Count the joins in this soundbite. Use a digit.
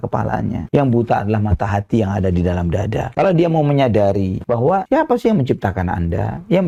0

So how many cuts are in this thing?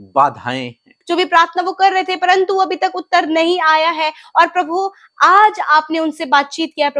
1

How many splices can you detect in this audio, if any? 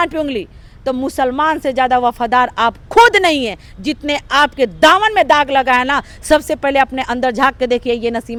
0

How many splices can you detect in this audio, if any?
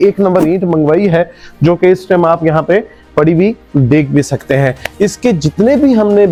0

